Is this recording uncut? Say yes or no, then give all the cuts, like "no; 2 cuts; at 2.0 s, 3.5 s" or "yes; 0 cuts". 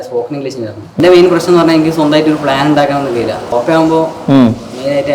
no; 2 cuts; at 1.0 s, 3.4 s